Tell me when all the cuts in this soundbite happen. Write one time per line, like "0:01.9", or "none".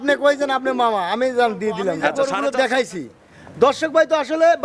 0:02.1